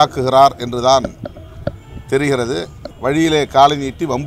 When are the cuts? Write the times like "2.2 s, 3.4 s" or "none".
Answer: 2.8 s